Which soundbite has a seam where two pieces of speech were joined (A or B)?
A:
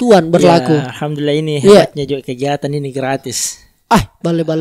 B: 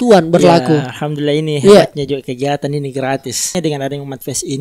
B